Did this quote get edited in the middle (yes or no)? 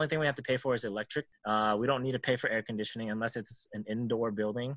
no